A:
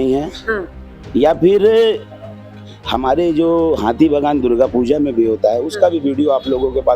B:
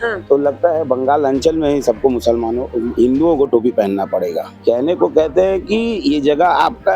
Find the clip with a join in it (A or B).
B